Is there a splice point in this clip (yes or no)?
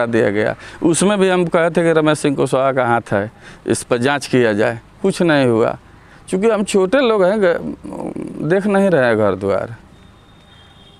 no